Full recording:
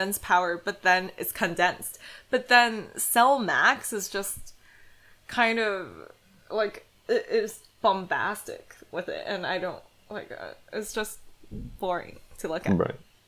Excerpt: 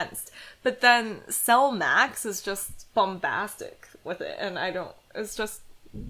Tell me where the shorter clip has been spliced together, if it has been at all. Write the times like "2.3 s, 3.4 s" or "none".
2.8 s, 5.0 s